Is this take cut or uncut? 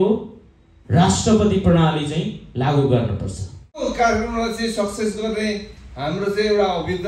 cut